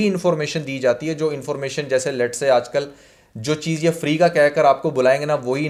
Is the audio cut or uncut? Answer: uncut